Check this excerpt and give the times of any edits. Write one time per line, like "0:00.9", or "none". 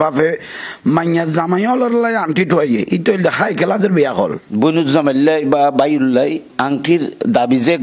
0:04.5